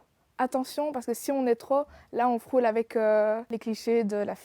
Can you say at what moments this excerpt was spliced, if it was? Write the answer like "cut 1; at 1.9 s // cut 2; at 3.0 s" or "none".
cut 1; at 3.5 s